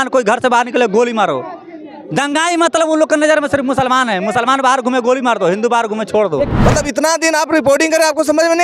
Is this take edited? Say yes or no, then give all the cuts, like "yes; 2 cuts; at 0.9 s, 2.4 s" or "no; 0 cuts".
yes; 1 cut; at 6.5 s